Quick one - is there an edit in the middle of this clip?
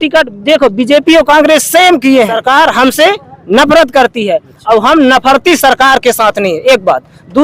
yes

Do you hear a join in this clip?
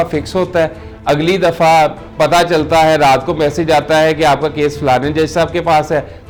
no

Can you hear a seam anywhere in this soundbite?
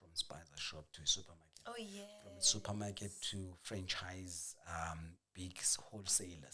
no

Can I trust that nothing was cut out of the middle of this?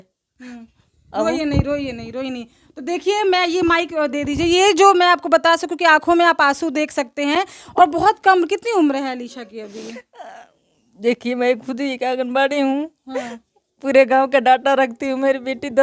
yes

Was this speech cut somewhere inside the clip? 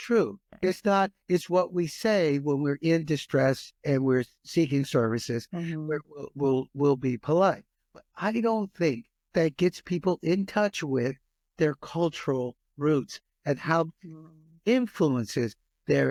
no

